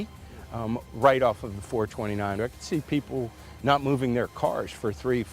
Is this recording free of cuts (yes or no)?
no